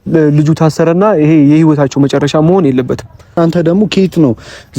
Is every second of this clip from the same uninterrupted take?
no; 1 cut; at 3.4 s

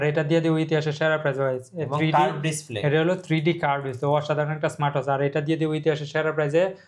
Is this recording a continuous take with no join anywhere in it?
yes; 0 cuts

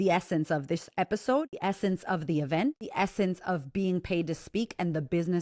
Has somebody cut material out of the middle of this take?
yes; 2 cuts; at 1.5 s, 2.8 s

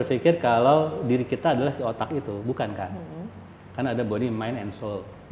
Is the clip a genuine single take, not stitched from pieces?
yes; 0 cuts

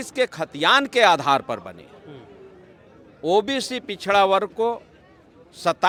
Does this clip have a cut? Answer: no; 0 cuts

